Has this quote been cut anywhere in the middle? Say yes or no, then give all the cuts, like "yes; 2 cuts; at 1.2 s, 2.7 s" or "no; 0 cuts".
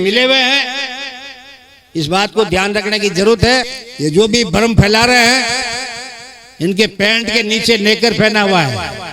yes; 1 cut; at 3.7 s